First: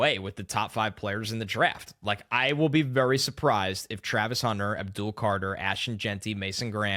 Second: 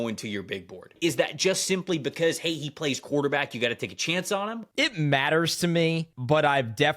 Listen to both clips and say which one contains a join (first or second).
second